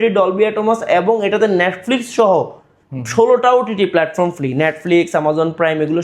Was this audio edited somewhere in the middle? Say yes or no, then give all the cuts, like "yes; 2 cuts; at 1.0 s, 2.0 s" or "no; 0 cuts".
no; 0 cuts